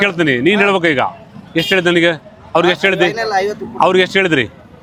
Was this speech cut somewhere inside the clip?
no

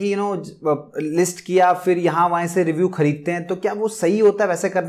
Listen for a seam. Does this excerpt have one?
no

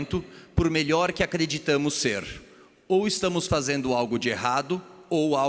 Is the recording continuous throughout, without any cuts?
yes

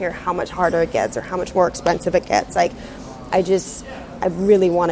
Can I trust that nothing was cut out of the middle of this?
yes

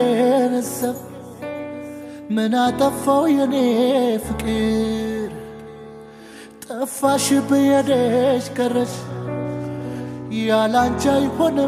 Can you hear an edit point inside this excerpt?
no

